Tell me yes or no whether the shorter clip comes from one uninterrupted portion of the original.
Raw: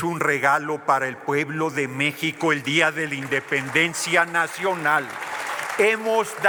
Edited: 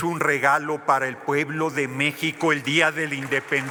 yes